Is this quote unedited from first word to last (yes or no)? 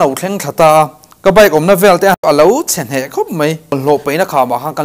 no